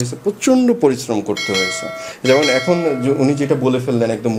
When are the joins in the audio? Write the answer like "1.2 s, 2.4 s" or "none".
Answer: none